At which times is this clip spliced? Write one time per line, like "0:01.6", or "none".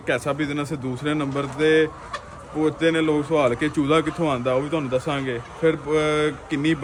none